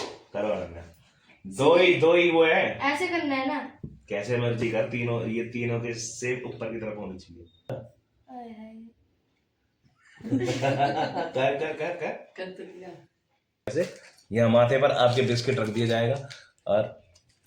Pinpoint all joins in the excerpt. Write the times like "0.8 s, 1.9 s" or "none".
7.7 s, 13.7 s

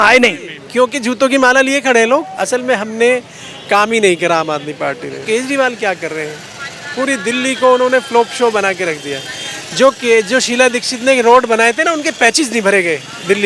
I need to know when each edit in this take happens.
2.3 s, 5.2 s

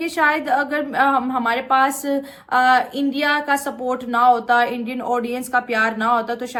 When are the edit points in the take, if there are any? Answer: none

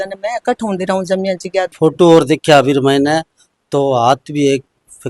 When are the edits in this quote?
1.7 s

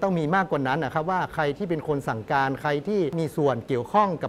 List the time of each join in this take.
3.1 s

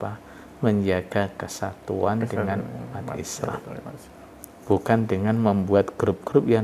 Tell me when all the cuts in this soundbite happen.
none

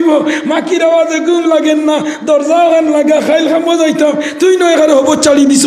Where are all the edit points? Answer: none

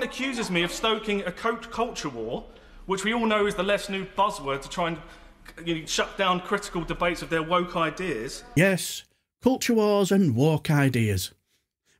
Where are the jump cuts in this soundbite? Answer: none

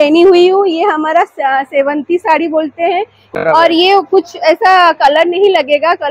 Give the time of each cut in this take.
3.3 s

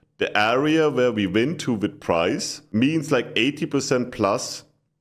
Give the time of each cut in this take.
2.5 s

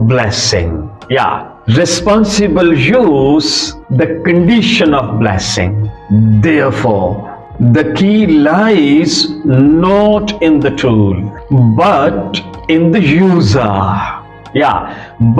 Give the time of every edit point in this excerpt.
5.9 s

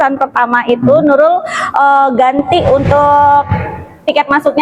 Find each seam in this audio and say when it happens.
none

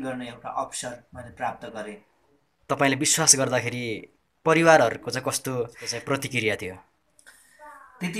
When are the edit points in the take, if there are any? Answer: none

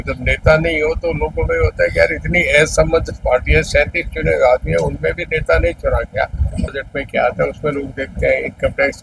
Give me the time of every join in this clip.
6.8 s

